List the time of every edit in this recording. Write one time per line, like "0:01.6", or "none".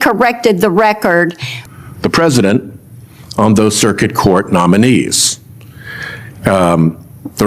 0:01.6